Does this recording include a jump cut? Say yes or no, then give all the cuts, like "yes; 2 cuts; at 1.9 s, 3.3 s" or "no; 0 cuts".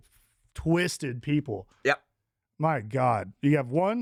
no; 0 cuts